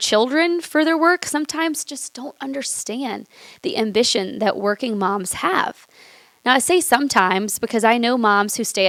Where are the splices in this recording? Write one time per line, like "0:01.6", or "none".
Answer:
none